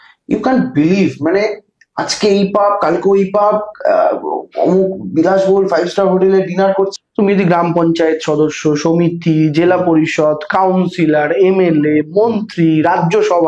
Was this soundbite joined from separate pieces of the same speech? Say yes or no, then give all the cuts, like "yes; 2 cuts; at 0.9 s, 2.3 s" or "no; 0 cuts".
yes; 1 cut; at 6.9 s